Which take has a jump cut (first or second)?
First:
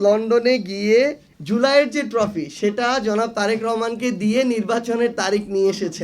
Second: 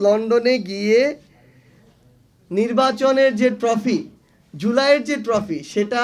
first